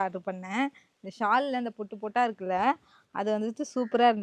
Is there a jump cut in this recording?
no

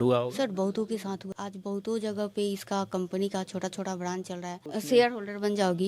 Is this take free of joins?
no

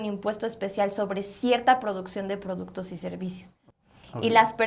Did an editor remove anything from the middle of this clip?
yes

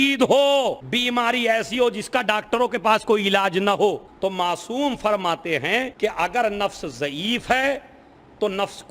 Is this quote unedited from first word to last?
no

